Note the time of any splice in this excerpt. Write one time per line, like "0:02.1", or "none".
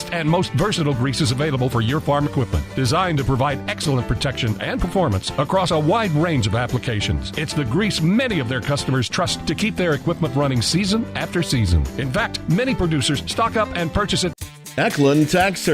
0:14.3